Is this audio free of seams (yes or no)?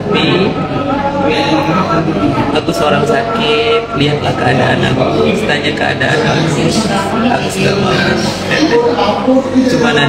yes